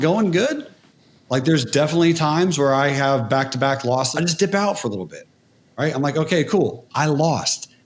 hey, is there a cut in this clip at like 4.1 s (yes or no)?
yes